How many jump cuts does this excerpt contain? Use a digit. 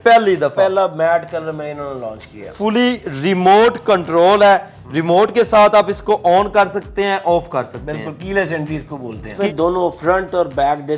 2